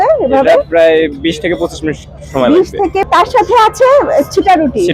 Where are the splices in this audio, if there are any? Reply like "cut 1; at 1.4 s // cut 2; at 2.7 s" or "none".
cut 1; at 3.1 s